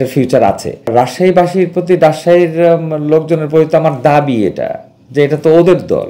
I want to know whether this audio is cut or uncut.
cut